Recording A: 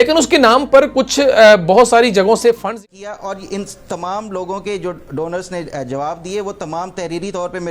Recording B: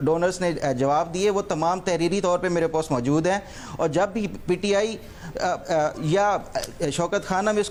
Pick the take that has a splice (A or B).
A